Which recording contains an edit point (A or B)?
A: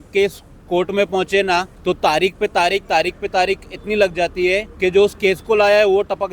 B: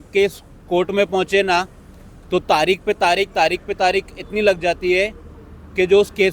A